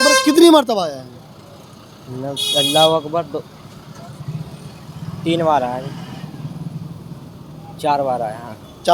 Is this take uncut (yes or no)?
yes